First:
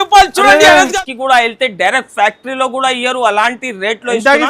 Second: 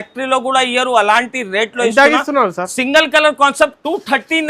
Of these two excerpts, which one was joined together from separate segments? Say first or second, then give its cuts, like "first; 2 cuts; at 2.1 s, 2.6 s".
first; 1 cut; at 0.9 s